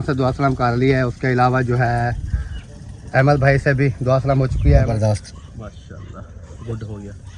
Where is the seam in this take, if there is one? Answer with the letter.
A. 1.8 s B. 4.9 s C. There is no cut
B